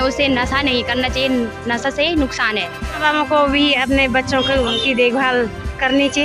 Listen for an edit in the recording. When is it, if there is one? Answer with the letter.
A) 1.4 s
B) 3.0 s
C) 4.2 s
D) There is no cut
B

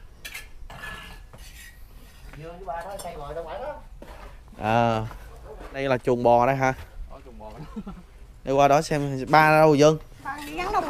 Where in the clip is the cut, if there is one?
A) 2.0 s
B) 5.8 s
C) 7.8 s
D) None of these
B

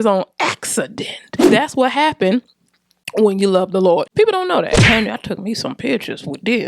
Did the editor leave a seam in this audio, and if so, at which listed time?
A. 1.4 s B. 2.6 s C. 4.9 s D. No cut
C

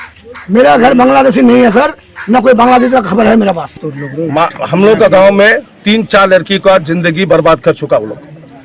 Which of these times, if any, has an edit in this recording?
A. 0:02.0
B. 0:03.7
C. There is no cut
B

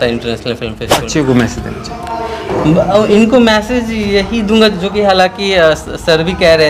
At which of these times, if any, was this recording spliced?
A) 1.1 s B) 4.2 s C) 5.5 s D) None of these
A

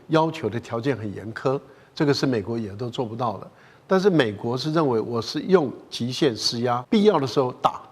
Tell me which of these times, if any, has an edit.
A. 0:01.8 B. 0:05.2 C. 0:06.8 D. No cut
C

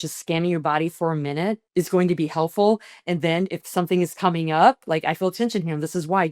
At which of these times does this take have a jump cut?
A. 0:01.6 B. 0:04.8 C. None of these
A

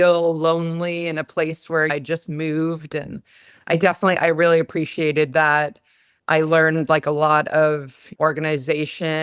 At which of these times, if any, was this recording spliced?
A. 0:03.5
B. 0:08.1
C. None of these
B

